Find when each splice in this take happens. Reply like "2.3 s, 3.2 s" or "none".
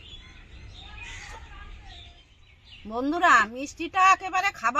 2.4 s